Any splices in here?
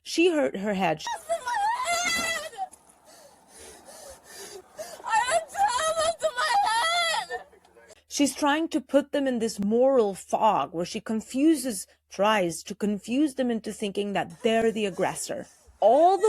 yes; 1 cut; at 1.1 s

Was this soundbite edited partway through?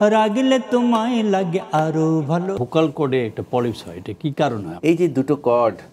yes; 2 cuts; at 2.6 s, 4.7 s

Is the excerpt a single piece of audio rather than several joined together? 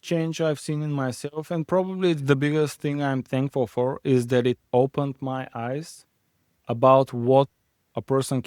yes; 0 cuts

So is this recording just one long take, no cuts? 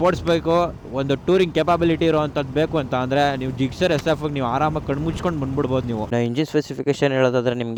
yes; 0 cuts

